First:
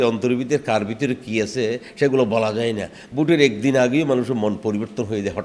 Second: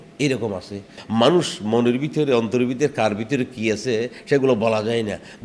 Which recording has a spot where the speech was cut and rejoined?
second; 1 cut; at 1.0 s

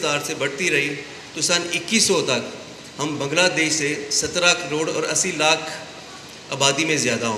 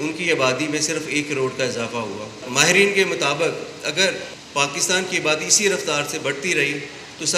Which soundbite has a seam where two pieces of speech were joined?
second; 2 cuts; at 2.4 s, 4.3 s

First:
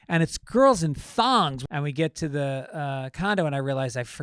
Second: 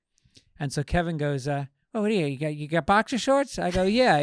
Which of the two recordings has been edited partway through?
first; 1 cut; at 1.6 s

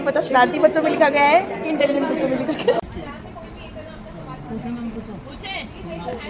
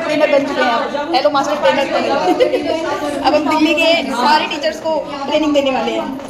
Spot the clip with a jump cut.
first; 1 cut; at 2.8 s

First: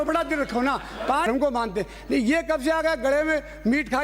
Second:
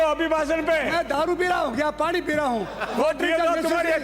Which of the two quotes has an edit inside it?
first; 1 cut; at 1.3 s

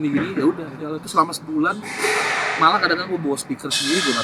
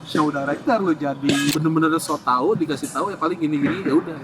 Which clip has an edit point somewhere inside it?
second; 1 cut; at 1.5 s

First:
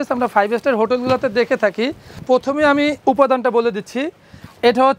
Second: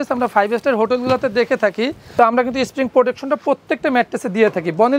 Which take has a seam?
second; 1 cut; at 2.0 s

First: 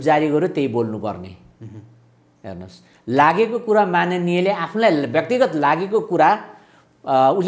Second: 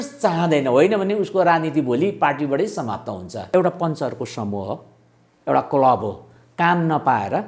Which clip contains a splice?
second; 1 cut; at 3.5 s

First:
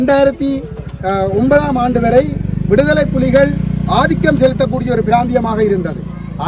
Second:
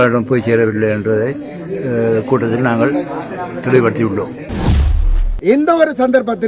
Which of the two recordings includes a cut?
second; 1 cut; at 5.0 s

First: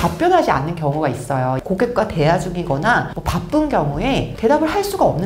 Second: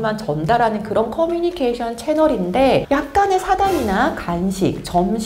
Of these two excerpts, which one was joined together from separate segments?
first; 1 cut; at 1.6 s

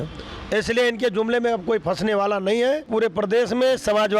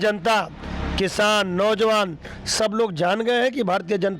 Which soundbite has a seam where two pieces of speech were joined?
first; 1 cut; at 2.8 s

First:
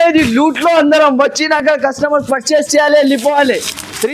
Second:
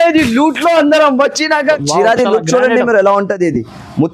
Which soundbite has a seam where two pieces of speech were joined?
second; 1 cut; at 1.6 s

